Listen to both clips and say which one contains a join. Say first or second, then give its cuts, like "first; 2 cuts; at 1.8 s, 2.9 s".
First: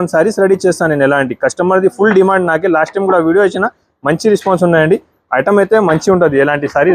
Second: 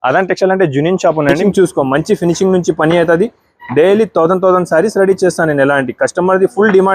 second; 1 cut; at 1.3 s